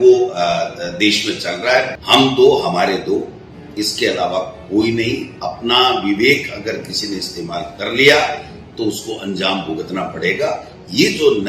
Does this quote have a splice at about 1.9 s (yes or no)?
yes